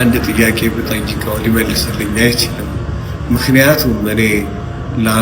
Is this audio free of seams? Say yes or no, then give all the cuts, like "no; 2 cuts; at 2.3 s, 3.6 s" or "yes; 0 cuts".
yes; 0 cuts